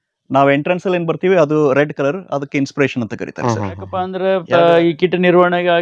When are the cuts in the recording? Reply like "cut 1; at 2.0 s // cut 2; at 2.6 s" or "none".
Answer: cut 1; at 4.1 s